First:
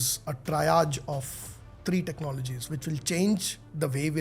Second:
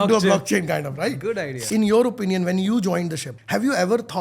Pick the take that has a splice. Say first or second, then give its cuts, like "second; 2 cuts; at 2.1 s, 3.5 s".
second; 2 cuts; at 1.6 s, 3.3 s